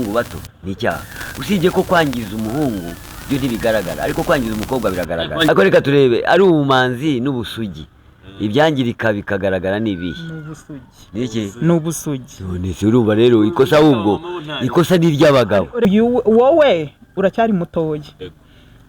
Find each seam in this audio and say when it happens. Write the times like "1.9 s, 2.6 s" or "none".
5.5 s, 15.9 s